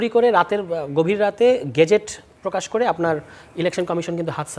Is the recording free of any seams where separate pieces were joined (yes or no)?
yes